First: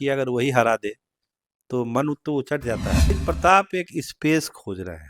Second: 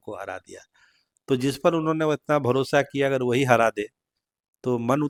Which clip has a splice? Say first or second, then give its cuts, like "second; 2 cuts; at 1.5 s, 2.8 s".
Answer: first; 1 cut; at 3.1 s